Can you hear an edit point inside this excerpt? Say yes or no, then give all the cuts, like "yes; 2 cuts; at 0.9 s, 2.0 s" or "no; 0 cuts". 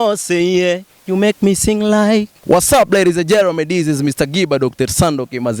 yes; 1 cut; at 2.3 s